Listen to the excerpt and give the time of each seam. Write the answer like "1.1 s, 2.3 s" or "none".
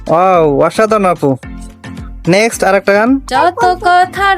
3.2 s